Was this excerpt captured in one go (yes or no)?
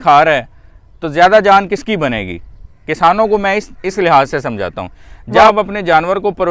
no